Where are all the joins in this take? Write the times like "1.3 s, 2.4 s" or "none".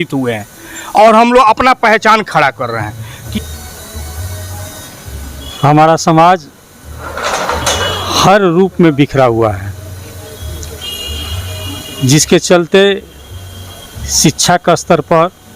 3.1 s